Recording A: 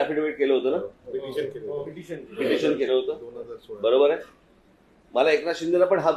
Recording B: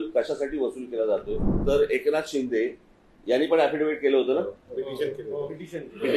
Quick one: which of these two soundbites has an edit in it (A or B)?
B